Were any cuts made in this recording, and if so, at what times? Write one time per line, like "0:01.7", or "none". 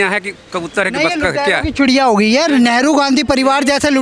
none